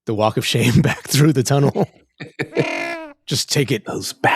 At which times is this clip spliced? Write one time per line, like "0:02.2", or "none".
0:03.2